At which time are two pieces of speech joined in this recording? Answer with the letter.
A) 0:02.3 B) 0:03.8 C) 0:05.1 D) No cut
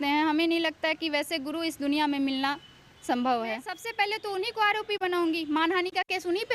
B